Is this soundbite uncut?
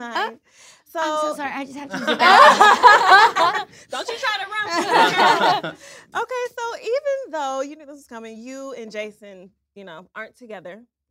yes; 0 cuts

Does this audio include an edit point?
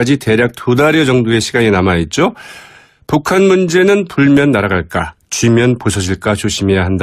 no; 0 cuts

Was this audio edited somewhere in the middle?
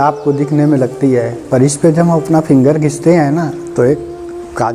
no; 0 cuts

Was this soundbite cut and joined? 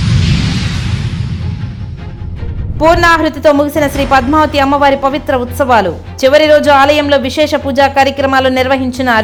no; 0 cuts

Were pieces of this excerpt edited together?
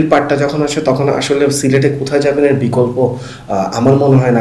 no; 0 cuts

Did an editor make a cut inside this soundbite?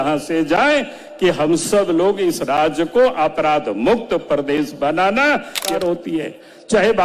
yes; 1 cut; at 5.6 s

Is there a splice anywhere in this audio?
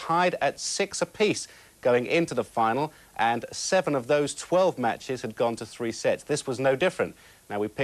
no; 0 cuts

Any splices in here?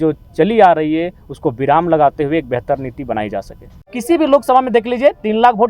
yes; 1 cut; at 4.0 s

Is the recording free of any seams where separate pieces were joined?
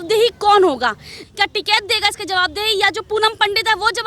no; 1 cut; at 1.3 s

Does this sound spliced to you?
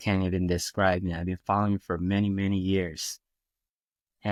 no; 0 cuts

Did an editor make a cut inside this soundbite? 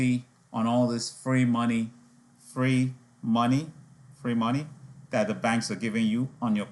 no; 0 cuts

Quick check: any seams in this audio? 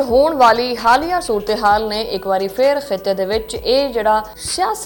no; 0 cuts

